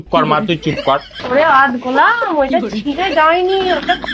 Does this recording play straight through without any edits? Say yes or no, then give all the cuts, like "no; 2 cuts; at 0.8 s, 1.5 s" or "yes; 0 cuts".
no; 1 cut; at 1.1 s